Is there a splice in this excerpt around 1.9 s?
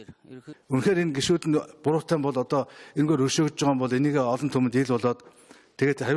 no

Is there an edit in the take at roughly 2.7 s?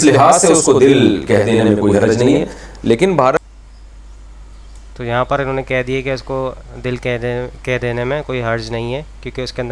no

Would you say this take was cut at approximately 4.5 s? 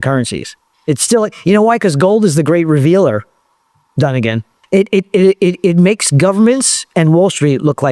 yes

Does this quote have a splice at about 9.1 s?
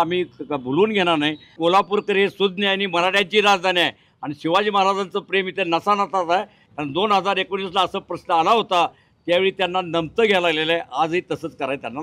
no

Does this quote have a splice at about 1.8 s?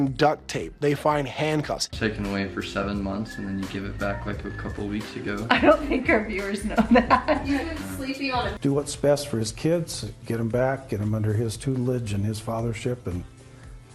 yes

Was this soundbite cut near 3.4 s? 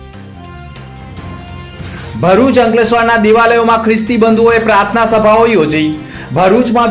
no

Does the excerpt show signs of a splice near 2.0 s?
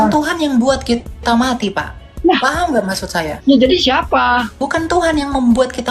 no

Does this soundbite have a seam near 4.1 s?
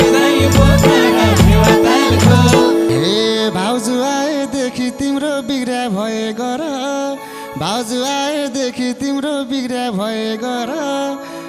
no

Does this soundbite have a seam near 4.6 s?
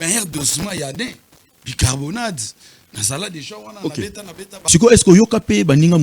yes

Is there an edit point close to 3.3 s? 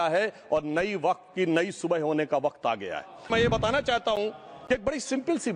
yes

